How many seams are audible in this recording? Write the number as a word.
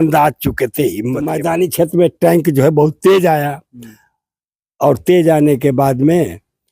one